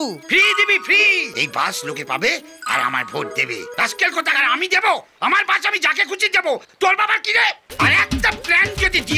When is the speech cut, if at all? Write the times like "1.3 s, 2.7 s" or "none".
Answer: 1.3 s, 3.6 s, 7.6 s